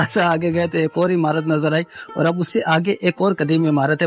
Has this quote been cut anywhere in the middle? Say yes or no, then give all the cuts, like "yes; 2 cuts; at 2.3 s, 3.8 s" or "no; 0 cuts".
no; 0 cuts